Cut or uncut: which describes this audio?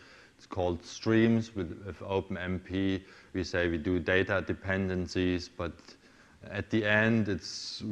cut